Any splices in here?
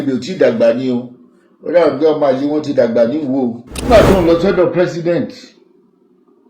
yes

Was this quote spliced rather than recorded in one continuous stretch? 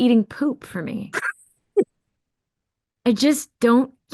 no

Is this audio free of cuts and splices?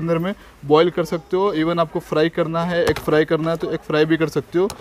yes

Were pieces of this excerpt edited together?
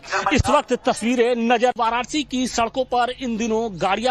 yes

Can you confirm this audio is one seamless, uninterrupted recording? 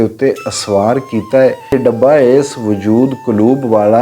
no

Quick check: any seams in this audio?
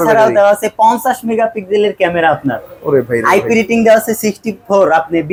no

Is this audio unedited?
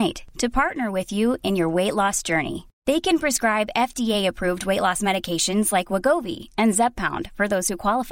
yes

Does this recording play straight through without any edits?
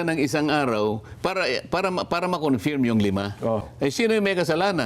no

